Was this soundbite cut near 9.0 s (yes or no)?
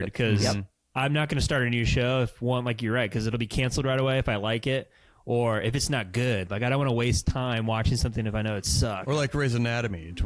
yes